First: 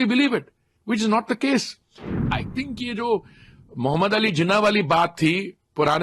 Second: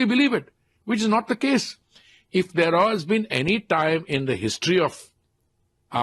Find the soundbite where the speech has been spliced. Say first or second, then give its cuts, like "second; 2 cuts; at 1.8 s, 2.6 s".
first; 1 cut; at 2.2 s